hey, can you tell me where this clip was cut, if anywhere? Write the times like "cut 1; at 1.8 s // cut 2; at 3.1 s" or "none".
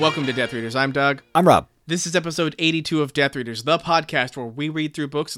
cut 1; at 1.8 s